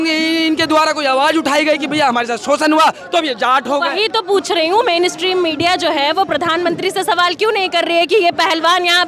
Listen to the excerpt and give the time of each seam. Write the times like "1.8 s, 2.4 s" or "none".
none